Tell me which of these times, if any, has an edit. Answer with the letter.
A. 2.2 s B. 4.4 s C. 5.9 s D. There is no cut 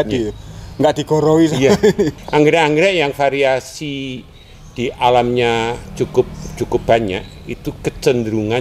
A